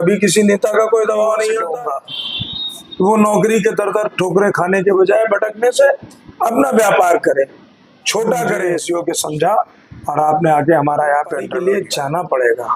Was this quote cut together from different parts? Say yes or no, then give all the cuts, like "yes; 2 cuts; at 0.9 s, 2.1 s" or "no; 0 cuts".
yes; 3 cuts; at 1.7 s, 8.7 s, 11.6 s